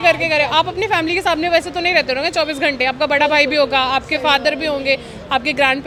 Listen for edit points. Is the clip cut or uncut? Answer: uncut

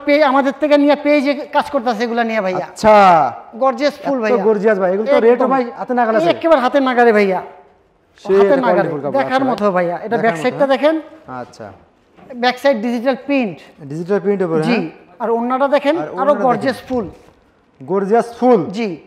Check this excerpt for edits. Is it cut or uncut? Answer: uncut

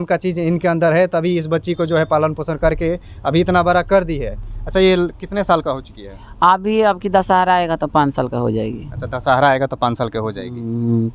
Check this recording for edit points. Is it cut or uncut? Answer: uncut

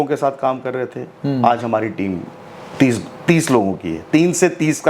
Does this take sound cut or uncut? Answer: uncut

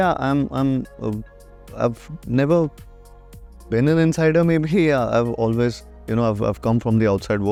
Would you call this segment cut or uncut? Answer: uncut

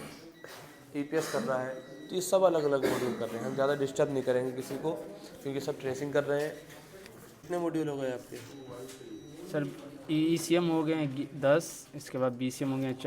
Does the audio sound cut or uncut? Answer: cut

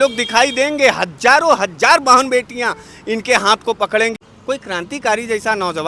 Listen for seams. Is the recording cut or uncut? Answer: cut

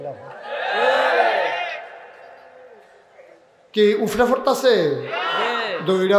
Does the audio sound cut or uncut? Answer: uncut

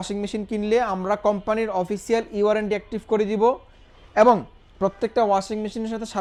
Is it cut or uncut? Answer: uncut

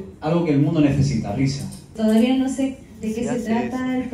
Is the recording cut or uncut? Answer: cut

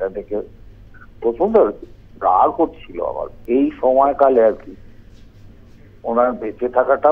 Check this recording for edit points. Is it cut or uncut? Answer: cut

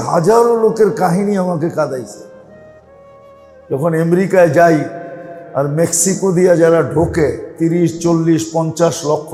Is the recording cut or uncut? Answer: uncut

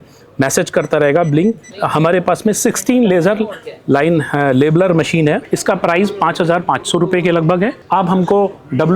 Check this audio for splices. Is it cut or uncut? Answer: cut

